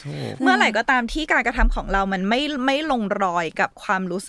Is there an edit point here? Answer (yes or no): no